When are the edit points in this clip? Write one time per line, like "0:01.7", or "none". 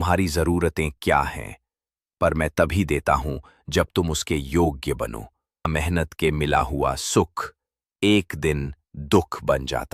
0:05.7